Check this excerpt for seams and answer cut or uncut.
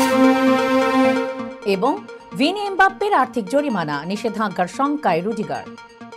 cut